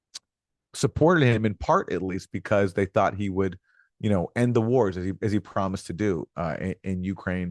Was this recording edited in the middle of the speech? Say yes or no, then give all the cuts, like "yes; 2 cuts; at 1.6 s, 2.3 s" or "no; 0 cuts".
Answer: no; 0 cuts